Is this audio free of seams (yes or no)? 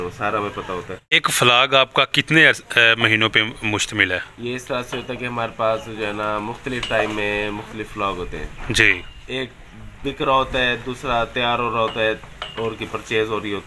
no